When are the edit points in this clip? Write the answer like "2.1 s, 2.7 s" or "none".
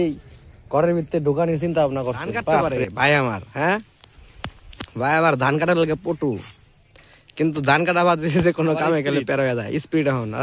2.6 s